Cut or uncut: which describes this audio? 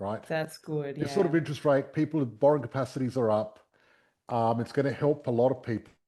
uncut